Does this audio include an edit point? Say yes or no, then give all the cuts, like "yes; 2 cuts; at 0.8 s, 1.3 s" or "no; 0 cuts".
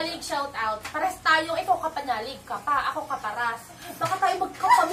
no; 0 cuts